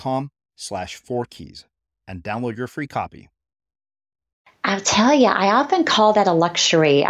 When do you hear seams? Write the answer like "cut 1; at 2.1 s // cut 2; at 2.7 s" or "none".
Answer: cut 1; at 4.6 s